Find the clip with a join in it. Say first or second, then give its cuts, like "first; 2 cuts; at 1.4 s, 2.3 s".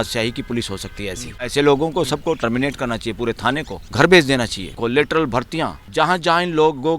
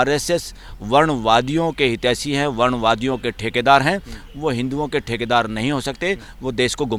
first; 4 cuts; at 1.4 s, 3.8 s, 4.8 s, 5.8 s